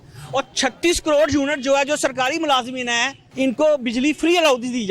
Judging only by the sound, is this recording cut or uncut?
cut